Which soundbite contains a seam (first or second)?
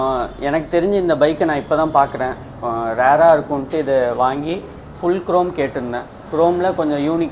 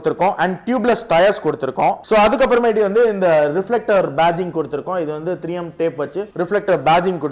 second